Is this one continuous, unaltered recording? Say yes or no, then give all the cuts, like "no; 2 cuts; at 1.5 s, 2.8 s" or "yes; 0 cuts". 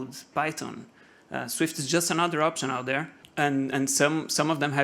no; 1 cut; at 3.2 s